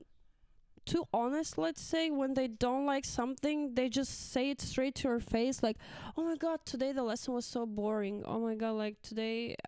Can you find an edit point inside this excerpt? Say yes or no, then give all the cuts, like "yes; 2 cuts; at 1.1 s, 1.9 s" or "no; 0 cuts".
no; 0 cuts